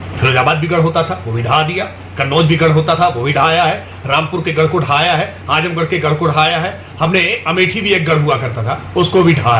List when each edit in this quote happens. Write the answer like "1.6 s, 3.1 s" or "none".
none